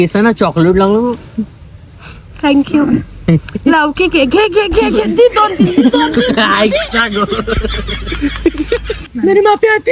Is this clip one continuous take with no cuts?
no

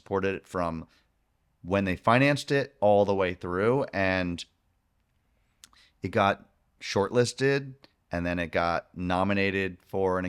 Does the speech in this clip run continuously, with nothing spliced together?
yes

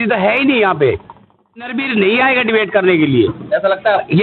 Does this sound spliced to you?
yes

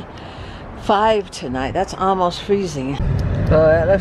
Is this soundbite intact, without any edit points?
no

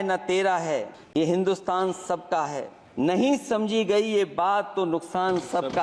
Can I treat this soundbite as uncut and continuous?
no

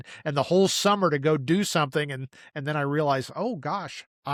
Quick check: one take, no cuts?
yes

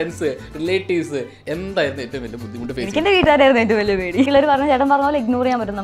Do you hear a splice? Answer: yes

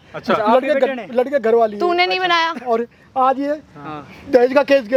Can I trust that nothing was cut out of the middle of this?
yes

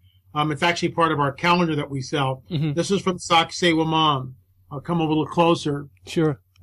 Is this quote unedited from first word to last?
no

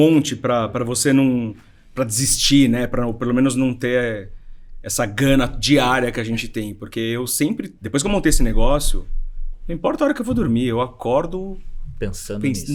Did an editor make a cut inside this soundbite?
no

